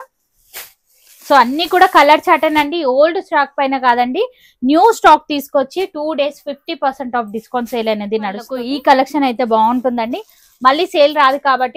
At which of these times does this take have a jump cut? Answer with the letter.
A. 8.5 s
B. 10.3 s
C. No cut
A